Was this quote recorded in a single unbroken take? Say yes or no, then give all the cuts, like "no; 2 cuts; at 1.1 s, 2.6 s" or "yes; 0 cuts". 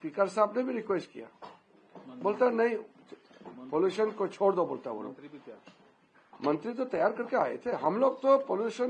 yes; 0 cuts